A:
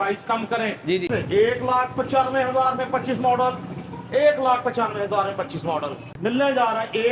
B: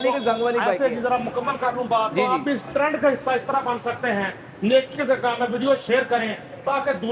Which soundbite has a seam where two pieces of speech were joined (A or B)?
A